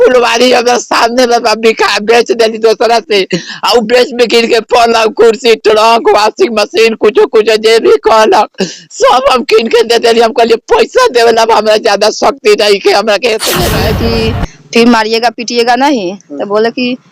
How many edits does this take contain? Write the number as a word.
one